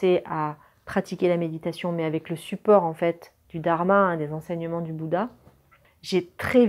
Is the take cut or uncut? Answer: uncut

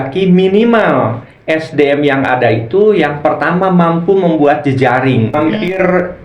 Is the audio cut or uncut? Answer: cut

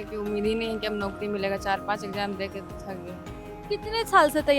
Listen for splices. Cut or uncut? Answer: uncut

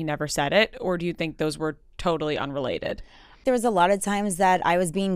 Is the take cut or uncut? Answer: cut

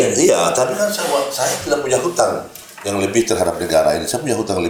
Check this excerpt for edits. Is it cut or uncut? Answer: uncut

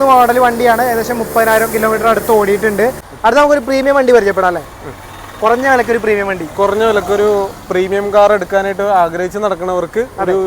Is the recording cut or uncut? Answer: cut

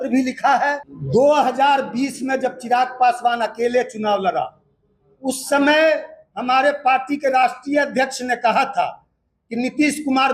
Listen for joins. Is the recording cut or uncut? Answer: cut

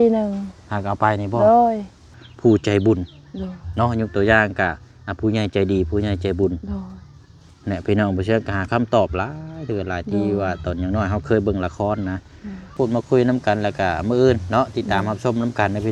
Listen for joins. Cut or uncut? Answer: cut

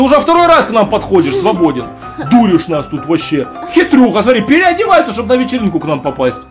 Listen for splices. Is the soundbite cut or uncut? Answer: uncut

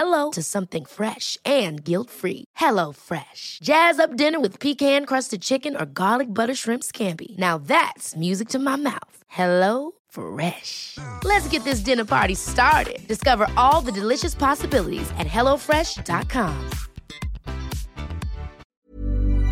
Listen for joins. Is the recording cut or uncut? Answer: cut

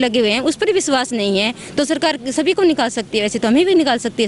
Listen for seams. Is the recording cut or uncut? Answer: uncut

